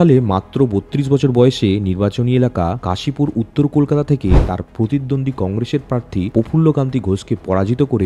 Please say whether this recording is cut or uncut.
uncut